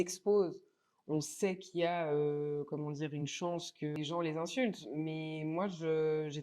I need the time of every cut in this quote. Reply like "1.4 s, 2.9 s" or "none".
4.0 s

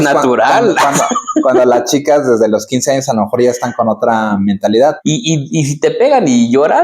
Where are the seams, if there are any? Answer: 5.0 s

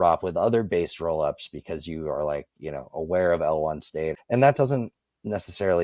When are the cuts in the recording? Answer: 4.1 s

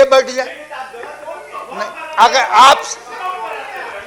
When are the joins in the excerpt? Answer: none

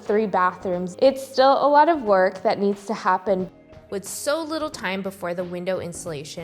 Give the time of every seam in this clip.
3.5 s

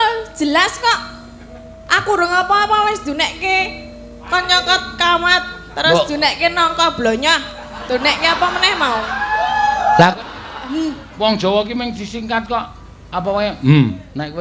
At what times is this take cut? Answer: 10.1 s

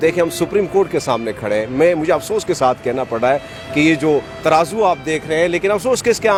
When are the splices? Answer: none

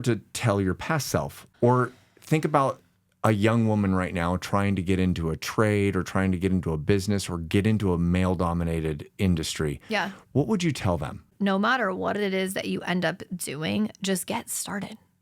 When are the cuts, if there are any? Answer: 1.4 s, 11.3 s

